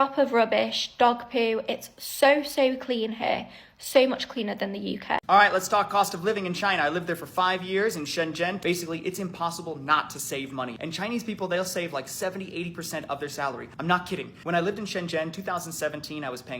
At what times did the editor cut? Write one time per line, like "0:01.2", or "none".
0:05.2